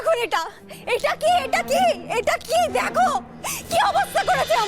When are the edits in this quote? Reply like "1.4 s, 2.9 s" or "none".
none